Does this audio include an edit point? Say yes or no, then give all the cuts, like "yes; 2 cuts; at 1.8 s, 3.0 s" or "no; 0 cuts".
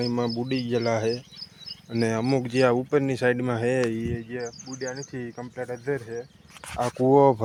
no; 0 cuts